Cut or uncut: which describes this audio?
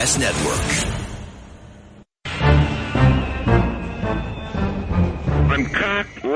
cut